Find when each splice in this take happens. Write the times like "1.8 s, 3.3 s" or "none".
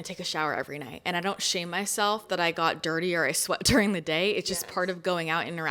none